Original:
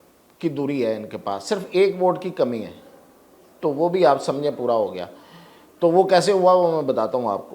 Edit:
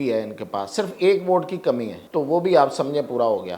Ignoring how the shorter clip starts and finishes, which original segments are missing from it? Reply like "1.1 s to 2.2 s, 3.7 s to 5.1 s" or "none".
2.7 s to 3.4 s